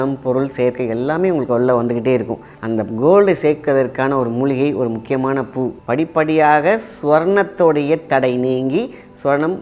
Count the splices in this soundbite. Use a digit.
2